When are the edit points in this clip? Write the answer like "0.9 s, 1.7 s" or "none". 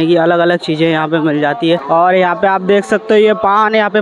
1.8 s